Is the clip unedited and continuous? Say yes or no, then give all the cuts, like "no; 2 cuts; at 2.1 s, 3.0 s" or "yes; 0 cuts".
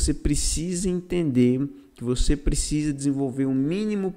yes; 0 cuts